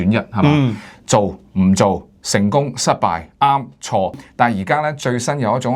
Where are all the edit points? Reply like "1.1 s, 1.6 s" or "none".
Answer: 4.2 s